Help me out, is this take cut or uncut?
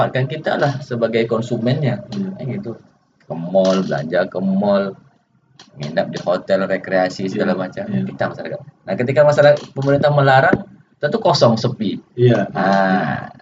uncut